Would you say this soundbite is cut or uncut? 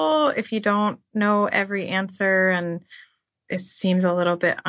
cut